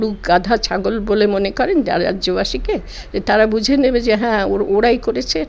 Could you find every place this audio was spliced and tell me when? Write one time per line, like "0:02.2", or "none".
none